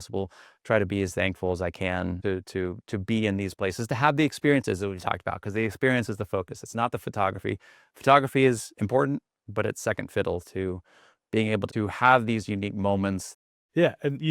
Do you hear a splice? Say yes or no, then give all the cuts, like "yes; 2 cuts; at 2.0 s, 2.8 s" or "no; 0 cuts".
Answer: yes; 1 cut; at 13.3 s